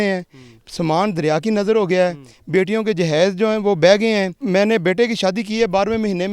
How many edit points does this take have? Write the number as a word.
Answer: one